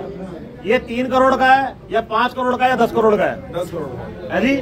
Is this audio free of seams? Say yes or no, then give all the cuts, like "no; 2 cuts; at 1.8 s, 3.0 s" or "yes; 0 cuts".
yes; 0 cuts